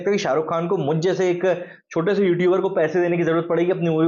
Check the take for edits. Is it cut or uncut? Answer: uncut